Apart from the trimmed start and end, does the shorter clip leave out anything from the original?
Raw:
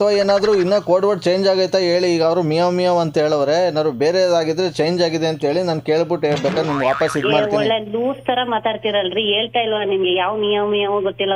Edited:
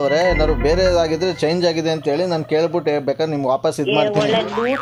no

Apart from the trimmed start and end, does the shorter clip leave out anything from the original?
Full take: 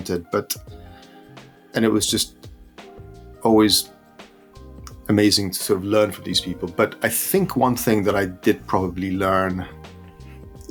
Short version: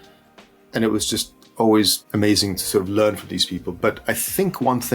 yes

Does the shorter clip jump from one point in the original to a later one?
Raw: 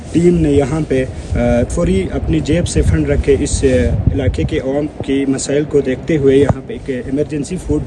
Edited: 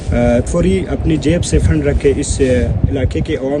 no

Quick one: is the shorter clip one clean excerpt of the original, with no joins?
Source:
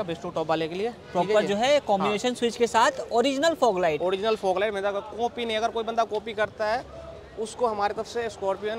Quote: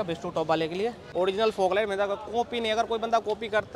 no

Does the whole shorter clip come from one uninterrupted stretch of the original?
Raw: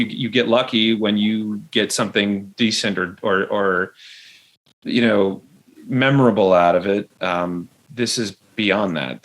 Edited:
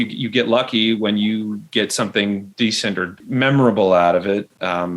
no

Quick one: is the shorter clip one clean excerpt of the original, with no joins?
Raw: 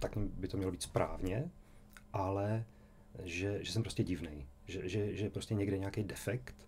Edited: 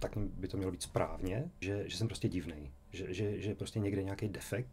no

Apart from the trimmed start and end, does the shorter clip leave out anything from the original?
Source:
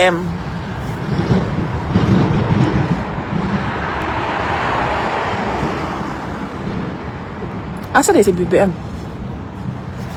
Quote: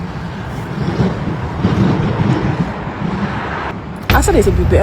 yes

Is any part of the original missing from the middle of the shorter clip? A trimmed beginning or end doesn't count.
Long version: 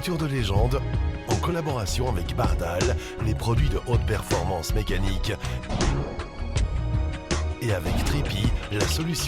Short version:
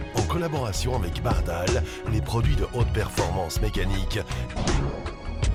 no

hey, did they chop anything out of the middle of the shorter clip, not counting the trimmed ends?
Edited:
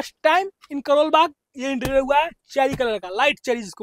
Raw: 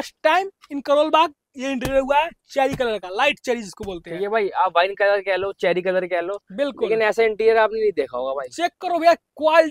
no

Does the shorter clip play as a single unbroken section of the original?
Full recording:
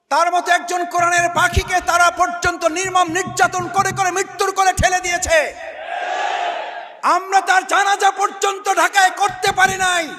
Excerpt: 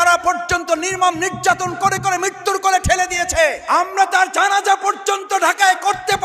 no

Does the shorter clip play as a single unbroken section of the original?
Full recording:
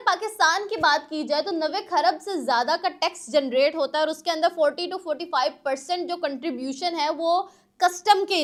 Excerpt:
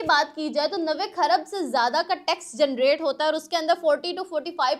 yes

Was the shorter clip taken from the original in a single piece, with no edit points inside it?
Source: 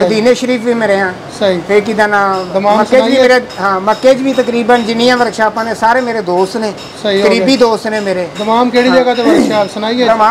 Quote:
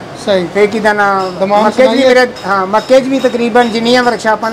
yes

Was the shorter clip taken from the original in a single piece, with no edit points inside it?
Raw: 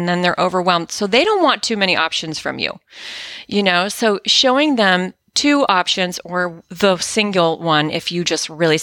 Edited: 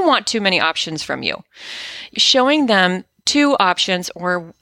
no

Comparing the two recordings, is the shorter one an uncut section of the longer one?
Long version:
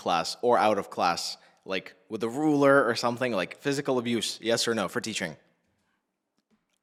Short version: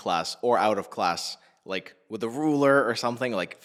yes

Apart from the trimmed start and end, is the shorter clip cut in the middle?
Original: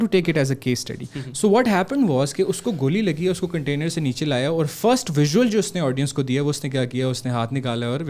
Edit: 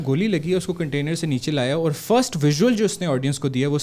no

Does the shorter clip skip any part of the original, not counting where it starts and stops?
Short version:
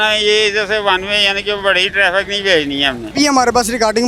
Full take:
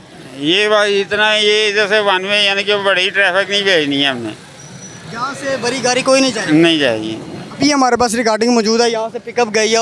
yes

